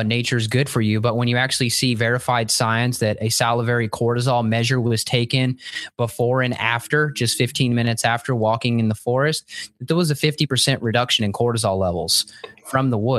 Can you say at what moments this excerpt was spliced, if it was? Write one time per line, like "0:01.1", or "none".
none